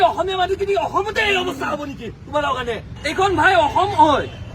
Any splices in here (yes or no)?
yes